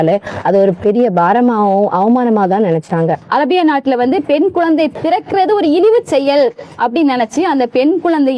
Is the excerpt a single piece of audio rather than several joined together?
no; 2 cuts; at 3.2 s, 4.9 s

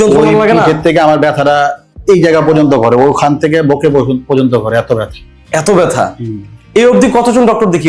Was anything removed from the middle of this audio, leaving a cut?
no; 0 cuts

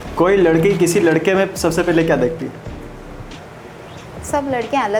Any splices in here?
no; 0 cuts

